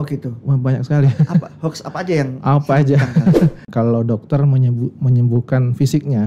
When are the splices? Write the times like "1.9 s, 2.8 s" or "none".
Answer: 3.7 s